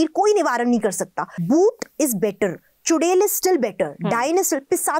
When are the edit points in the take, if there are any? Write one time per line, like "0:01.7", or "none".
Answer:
0:01.3